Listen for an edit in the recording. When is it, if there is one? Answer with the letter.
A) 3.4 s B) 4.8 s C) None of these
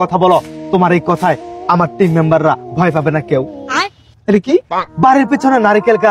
C